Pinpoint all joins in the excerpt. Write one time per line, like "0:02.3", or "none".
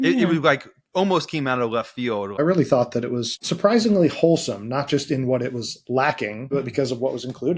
0:02.4
0:03.4
0:06.4